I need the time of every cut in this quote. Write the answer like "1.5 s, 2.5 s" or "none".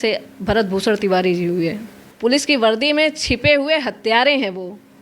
2.0 s